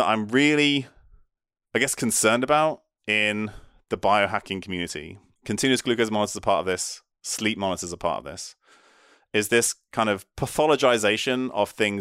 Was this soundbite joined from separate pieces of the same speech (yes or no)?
no